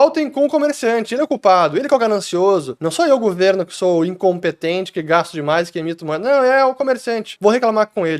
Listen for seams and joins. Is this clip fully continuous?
no; 2 cuts; at 2.8 s, 7.3 s

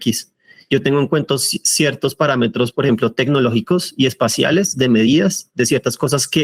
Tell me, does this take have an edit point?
no; 0 cuts

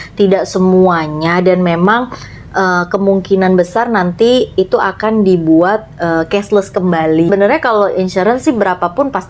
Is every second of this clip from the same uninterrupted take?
no; 1 cut; at 7.3 s

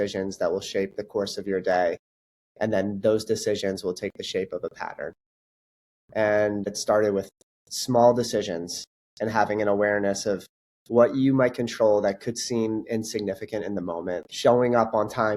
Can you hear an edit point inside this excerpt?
yes; 2 cuts; at 6.8 s, 14.3 s

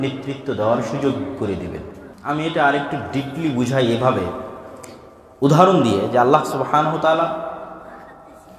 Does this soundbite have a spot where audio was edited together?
yes; 1 cut; at 2.1 s

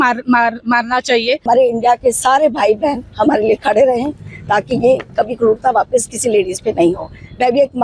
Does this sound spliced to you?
yes; 1 cut; at 1.4 s

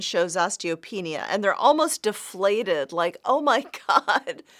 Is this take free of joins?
yes; 0 cuts

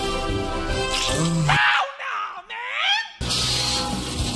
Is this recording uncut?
no; 1 cut; at 3.2 s

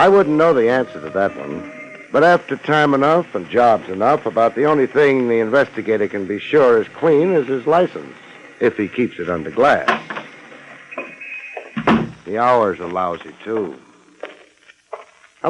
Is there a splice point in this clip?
yes; 1 cut; at 8.0 s

